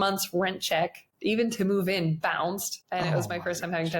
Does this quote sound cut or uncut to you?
cut